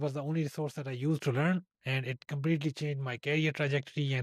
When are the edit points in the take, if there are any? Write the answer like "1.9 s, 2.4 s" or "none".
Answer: none